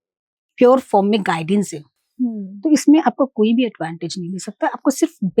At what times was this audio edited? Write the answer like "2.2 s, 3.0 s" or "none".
none